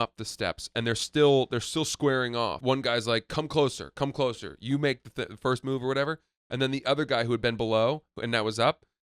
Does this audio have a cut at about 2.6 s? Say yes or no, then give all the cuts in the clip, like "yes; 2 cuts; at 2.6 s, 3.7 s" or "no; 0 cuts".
yes; 1 cut; at 2.6 s